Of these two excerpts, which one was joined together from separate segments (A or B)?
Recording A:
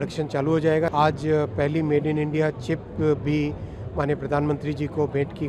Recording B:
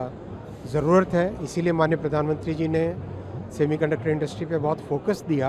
A